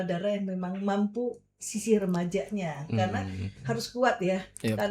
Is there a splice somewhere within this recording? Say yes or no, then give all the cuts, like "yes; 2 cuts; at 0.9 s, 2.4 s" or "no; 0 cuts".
no; 0 cuts